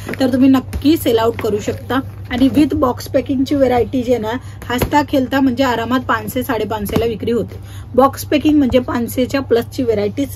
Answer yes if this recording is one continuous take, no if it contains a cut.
yes